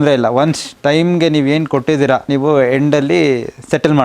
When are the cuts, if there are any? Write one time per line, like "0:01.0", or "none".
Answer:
0:02.3